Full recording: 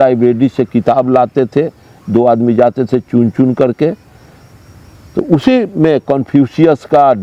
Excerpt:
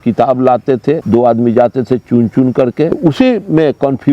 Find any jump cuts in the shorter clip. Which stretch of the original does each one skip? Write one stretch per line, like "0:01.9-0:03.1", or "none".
0:01.7-0:02.0
0:03.9-0:05.2